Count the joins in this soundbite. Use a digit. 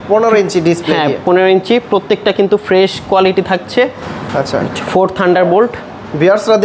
0